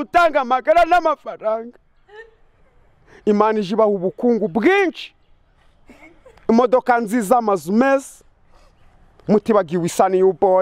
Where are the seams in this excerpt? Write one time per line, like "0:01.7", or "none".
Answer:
none